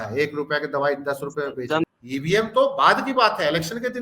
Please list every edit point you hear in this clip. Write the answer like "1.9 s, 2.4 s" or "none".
1.9 s